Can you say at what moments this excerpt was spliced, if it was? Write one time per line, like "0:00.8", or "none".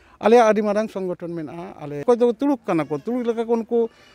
0:02.0